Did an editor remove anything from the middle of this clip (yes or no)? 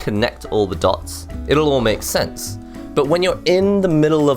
yes